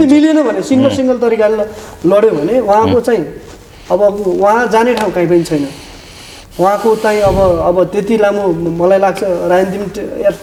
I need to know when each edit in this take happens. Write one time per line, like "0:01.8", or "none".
none